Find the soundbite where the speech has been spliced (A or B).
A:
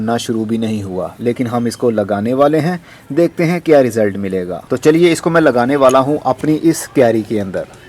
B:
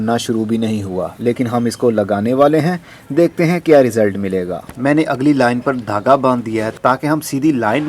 B